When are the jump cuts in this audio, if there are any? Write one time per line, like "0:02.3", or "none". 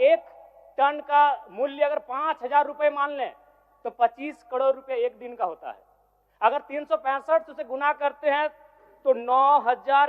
none